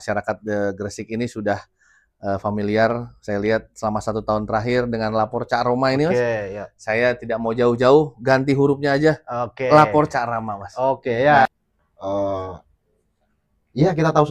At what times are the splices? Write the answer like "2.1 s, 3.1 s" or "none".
11.5 s